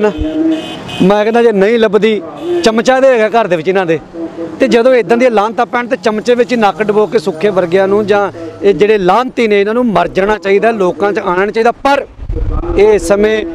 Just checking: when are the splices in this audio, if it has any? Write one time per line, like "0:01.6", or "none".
none